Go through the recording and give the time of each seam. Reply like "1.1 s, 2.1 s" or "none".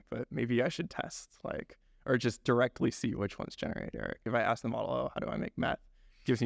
4.3 s

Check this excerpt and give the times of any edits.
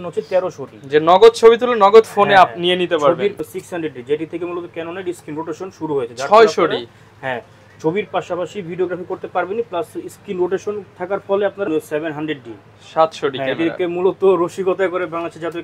3.4 s, 11.7 s

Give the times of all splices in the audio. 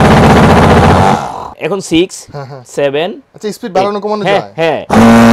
1.6 s

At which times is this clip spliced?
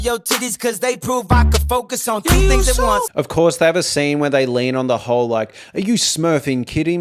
3.1 s

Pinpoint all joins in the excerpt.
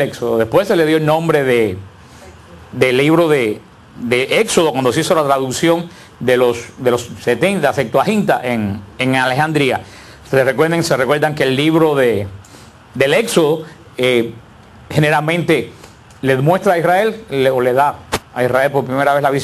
none

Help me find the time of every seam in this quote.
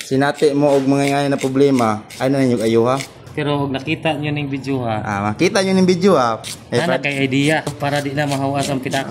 3.2 s, 6.4 s, 7.7 s

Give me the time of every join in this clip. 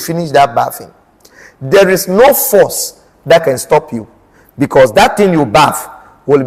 none

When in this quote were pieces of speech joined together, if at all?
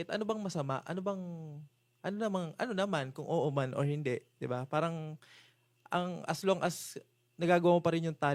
none

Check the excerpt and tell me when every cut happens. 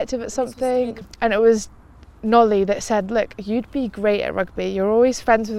1.0 s

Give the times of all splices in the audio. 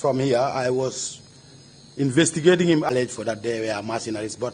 2.9 s

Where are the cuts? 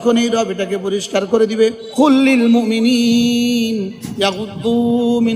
1.8 s

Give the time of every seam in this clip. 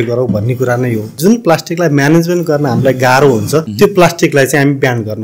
1.2 s, 3.7 s

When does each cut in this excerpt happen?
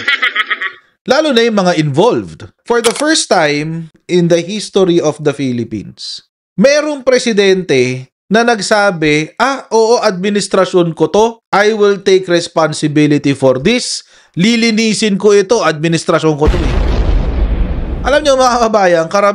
2.5 s

